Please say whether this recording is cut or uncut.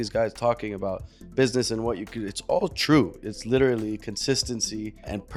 uncut